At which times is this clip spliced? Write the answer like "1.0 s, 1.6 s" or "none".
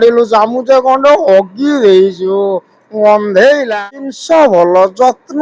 3.8 s